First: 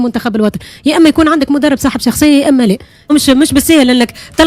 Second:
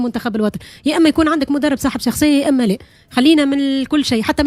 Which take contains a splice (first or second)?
first